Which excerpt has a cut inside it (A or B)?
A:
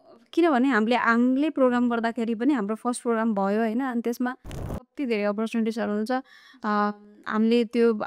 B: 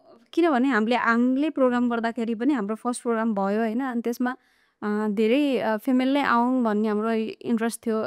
A